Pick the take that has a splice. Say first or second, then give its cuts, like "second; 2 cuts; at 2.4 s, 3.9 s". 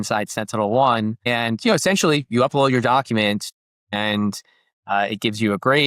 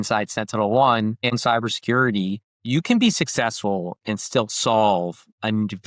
second; 2 cuts; at 1.3 s, 2.5 s